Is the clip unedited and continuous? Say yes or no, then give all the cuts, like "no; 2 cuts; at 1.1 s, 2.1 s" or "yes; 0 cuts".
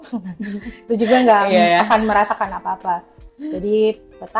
yes; 0 cuts